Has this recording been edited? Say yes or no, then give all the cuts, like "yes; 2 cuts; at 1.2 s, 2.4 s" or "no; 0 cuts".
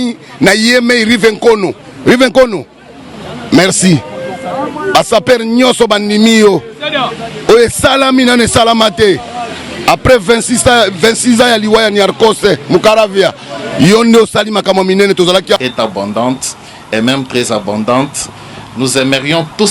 yes; 1 cut; at 15.6 s